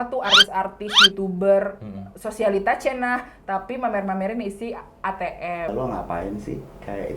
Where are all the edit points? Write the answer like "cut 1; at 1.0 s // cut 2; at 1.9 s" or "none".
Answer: cut 1; at 5.7 s